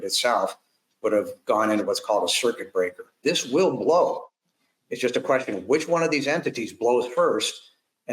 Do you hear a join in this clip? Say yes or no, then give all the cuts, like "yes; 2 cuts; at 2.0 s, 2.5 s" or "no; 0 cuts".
yes; 1 cut; at 3.2 s